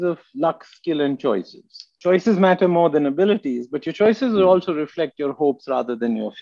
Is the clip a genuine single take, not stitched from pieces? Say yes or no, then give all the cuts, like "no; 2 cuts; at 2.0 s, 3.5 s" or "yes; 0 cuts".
no; 1 cut; at 1.9 s